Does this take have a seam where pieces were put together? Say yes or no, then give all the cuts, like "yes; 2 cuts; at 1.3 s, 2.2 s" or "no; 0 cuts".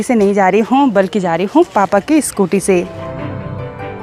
no; 0 cuts